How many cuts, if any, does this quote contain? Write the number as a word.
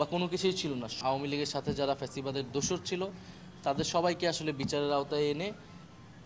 one